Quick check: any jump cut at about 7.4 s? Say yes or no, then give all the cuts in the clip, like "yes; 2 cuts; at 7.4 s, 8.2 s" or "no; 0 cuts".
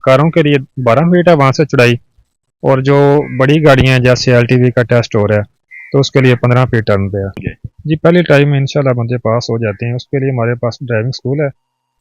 yes; 1 cut; at 7.4 s